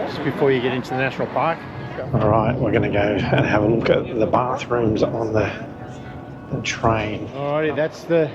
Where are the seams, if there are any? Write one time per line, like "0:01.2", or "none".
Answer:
0:01.8
0:07.3